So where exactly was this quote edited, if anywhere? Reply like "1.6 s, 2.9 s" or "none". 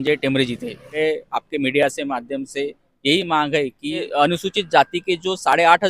1.0 s, 4.1 s